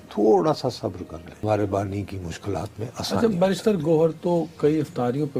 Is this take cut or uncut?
cut